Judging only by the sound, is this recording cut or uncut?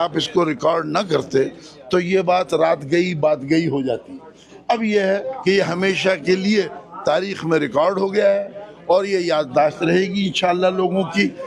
uncut